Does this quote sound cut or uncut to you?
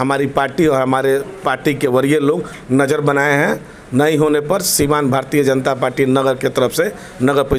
uncut